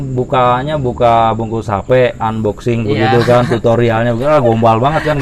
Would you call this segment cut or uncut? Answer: uncut